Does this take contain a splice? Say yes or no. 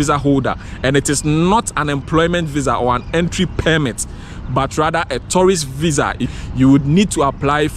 yes